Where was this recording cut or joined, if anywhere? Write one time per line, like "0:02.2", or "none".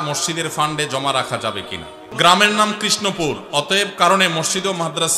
0:02.1